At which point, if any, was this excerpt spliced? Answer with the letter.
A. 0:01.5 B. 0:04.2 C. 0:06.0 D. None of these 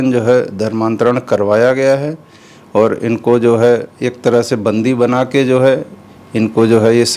D